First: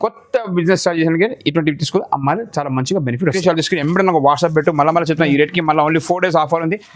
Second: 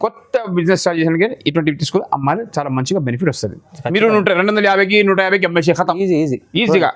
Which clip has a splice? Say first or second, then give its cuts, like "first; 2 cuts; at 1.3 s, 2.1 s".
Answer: first; 1 cut; at 3.4 s